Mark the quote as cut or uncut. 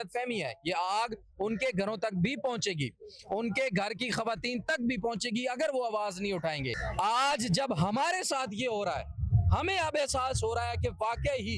cut